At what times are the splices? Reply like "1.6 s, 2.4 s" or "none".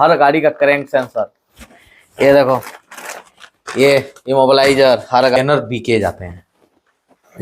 5.4 s